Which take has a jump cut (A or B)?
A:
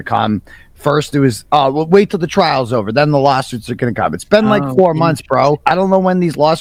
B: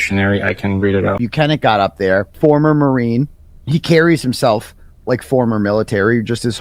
B